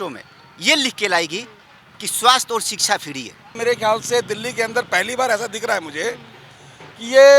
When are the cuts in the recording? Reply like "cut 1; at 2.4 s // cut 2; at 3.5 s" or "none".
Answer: cut 1; at 3.6 s